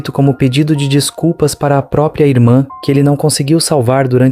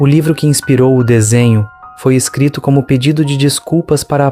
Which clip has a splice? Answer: first; 1 cut; at 2.8 s

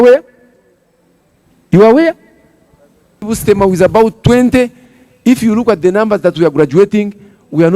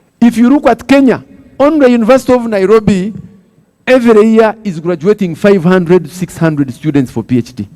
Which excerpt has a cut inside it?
first; 1 cut; at 3.2 s

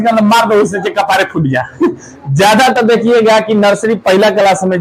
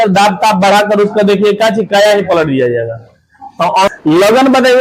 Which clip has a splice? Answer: second; 1 cut; at 3.9 s

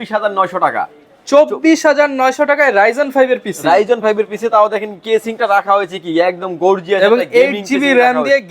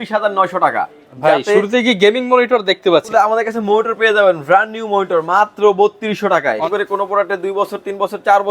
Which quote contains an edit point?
second; 3 cuts; at 1.0 s, 3.1 s, 6.7 s

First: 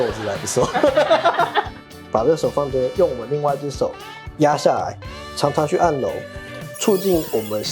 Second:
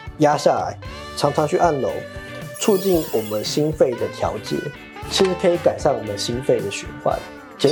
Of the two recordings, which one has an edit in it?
first; 1 cut; at 2.0 s

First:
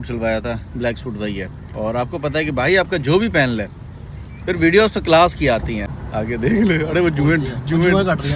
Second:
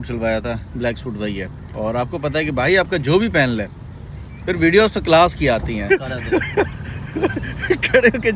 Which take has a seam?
second; 1 cut; at 5.9 s

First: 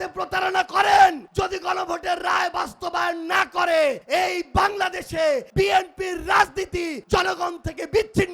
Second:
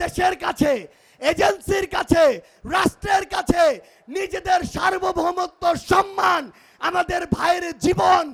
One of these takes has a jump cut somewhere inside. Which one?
first; 4 cuts; at 1.2 s, 4.0 s, 5.5 s, 7.0 s

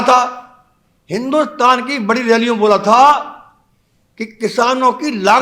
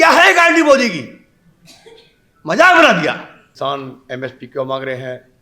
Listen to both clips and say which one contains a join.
second; 1 cut; at 3.4 s

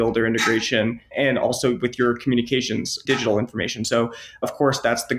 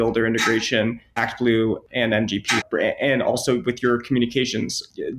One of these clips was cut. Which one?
first; 2 cuts; at 1.1 s, 3.0 s

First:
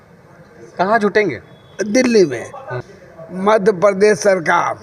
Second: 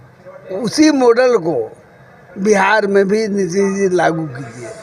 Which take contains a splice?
first; 1 cut; at 2.7 s

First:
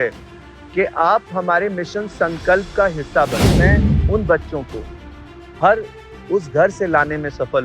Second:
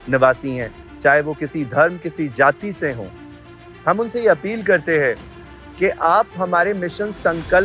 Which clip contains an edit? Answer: first; 1 cut; at 3.6 s

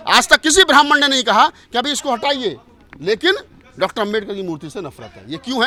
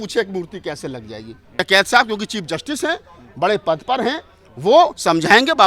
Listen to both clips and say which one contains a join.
second; 1 cut; at 1.5 s

